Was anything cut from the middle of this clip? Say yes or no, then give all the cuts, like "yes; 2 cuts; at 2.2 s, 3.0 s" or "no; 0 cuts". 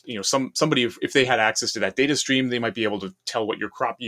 no; 0 cuts